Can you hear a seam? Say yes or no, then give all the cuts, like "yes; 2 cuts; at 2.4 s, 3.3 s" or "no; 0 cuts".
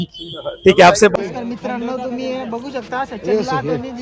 yes; 1 cut; at 1.1 s